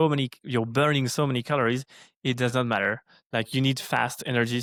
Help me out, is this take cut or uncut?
uncut